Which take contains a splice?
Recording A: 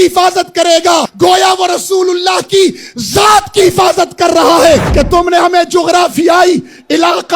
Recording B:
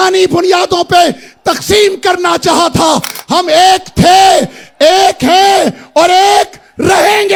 A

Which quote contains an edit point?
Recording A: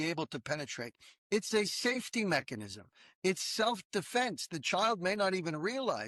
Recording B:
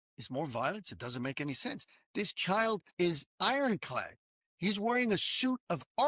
B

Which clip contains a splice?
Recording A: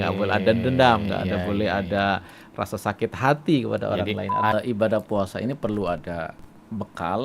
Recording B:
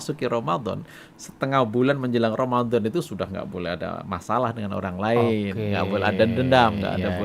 A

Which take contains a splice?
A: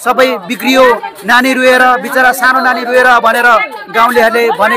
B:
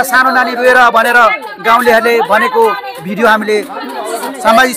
B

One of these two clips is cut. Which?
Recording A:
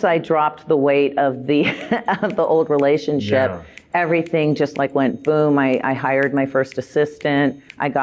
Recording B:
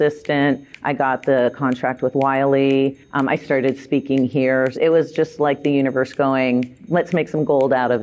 B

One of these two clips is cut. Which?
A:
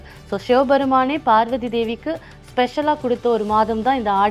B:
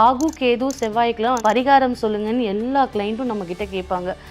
B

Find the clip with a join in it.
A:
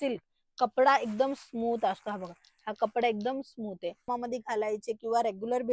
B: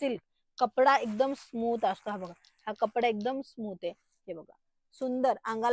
A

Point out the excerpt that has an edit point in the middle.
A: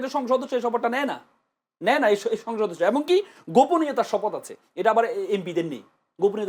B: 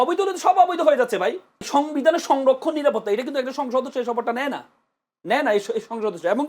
B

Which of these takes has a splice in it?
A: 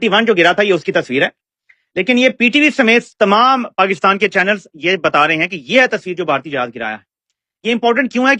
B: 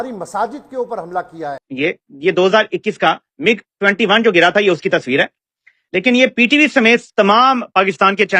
B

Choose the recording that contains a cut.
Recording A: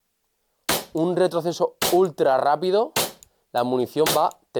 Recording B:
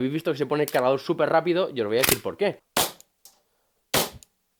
B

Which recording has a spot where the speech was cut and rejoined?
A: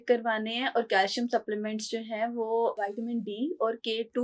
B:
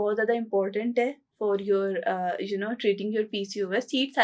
A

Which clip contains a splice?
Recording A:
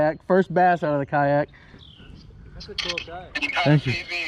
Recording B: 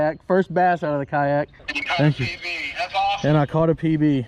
B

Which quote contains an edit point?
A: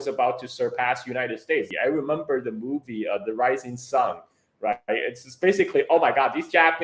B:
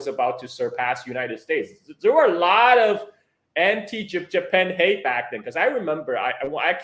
A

